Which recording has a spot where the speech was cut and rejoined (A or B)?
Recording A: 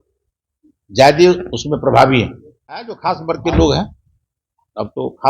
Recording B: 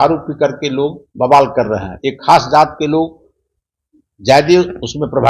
A